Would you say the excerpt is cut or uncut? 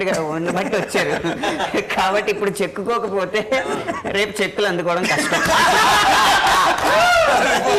uncut